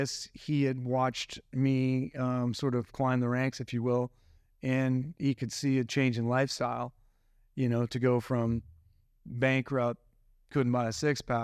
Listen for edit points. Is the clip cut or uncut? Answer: uncut